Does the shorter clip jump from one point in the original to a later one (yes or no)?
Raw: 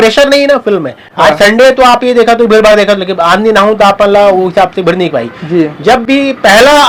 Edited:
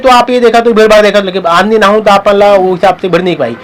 no